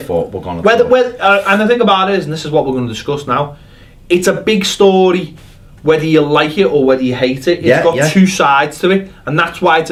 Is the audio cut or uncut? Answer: uncut